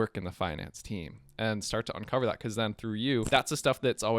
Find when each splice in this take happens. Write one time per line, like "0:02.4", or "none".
0:03.3

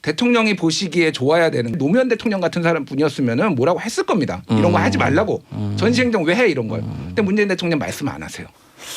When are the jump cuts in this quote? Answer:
0:01.8

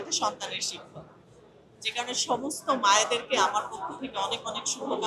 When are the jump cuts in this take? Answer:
none

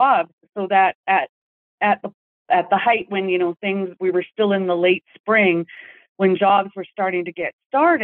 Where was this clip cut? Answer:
none

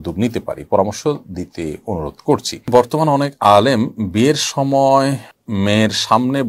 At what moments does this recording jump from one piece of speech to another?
0:02.5
0:05.3

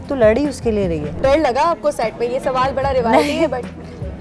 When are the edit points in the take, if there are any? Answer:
0:01.2

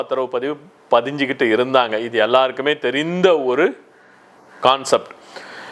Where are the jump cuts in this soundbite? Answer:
none

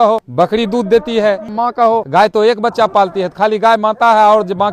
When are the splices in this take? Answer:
none

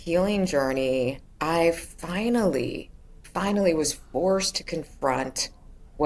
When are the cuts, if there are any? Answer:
none

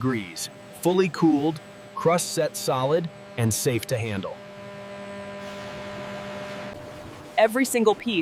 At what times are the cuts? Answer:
none

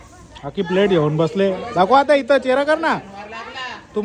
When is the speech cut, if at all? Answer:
none

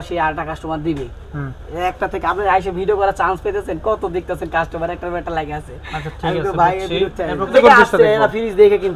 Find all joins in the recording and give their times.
0:07.5

